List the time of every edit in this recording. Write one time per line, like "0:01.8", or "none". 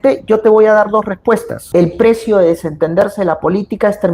0:01.7